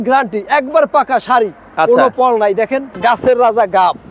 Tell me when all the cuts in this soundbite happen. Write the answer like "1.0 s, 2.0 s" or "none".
2.9 s